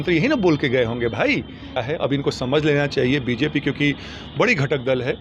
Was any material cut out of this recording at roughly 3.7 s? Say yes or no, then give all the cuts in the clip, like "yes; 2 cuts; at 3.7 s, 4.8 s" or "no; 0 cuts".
no; 1 cut; at 1.8 s